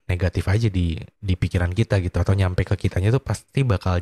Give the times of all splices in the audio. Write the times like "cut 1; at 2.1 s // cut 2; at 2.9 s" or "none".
cut 1; at 1.1 s